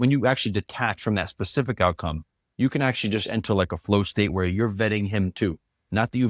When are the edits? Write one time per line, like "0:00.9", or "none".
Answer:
none